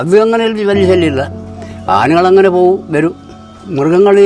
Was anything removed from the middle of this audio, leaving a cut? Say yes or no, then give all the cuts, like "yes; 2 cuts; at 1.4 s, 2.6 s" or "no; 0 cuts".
no; 0 cuts